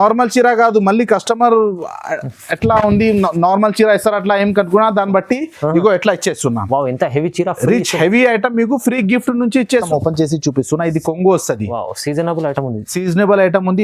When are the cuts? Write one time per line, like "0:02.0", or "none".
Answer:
0:09.9